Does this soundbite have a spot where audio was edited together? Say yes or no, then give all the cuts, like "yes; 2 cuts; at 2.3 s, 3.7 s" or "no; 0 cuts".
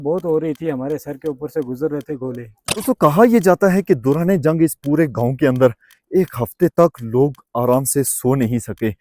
yes; 1 cut; at 2.8 s